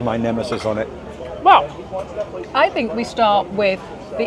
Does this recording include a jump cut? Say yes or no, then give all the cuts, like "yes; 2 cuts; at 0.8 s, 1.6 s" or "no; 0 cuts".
no; 0 cuts